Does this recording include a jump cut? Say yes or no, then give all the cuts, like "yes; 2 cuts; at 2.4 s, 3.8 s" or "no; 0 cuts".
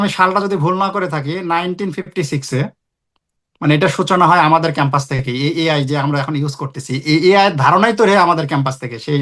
no; 0 cuts